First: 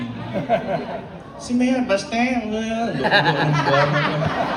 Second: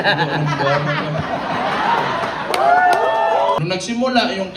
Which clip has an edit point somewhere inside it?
second; 1 cut; at 3.6 s

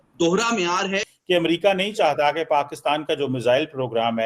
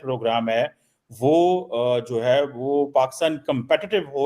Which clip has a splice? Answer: first; 1 cut; at 1.1 s

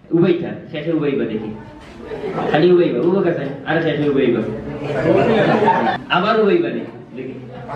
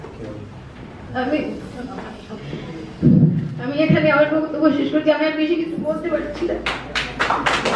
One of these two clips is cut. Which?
first; 1 cut; at 6.0 s

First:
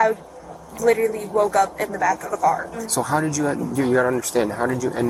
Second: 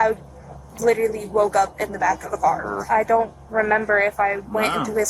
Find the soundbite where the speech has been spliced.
second; 1 cut; at 2.7 s

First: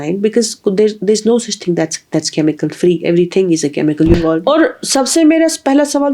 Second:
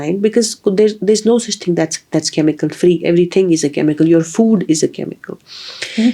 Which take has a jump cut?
first; 1 cut; at 4.1 s

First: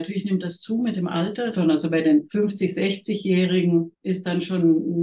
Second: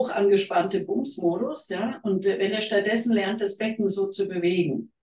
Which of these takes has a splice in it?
first; 3 cuts; at 1.5 s, 2.3 s, 3.9 s

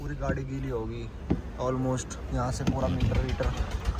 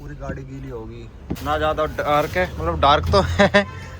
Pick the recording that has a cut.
second; 1 cut; at 1.4 s

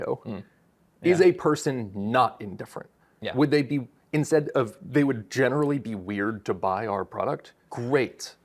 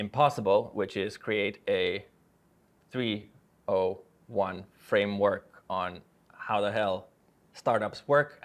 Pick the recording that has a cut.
first; 1 cut; at 7.5 s

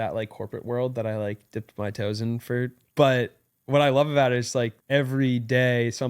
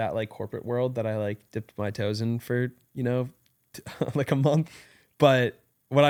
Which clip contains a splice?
first; 2 cuts; at 2.8 s, 4.8 s

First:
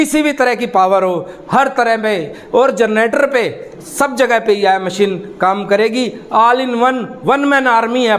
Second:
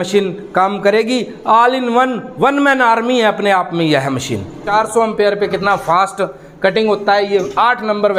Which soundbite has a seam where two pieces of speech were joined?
second; 1 cut; at 4.6 s

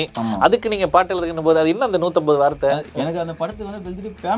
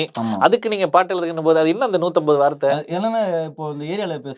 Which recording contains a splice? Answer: first; 1 cut; at 2.9 s

